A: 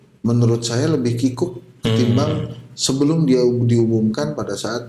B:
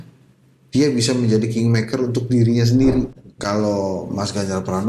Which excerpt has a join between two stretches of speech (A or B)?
B